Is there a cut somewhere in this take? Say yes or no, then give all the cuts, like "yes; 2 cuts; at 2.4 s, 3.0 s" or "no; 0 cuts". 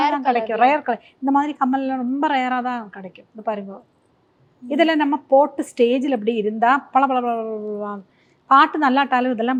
no; 0 cuts